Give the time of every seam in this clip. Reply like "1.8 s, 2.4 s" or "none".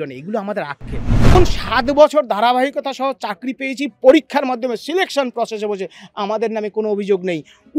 1.4 s